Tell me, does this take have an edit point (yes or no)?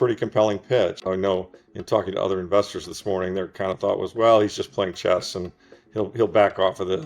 yes